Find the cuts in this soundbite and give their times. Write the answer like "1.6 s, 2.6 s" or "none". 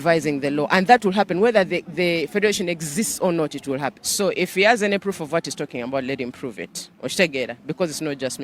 4.0 s

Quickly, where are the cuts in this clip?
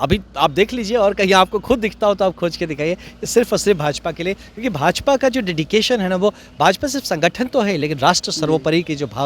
none

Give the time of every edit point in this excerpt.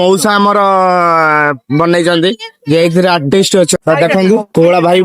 3.7 s

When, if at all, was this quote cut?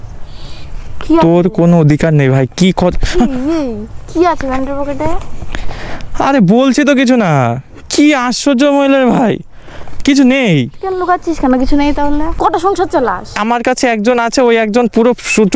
12.3 s, 13.4 s

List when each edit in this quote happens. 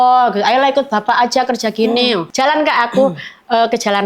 2.3 s

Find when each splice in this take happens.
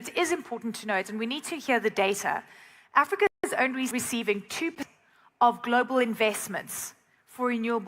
4.8 s

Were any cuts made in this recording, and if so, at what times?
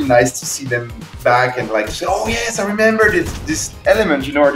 none

